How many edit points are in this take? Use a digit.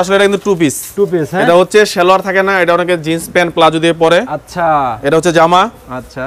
0